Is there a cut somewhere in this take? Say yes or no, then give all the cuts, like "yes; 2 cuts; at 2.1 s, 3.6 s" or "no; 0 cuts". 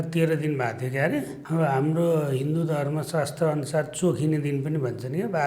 yes; 1 cut; at 1.4 s